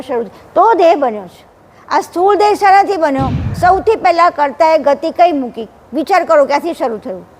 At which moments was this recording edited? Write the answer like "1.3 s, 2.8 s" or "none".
3.5 s